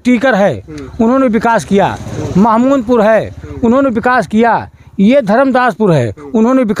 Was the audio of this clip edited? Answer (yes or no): no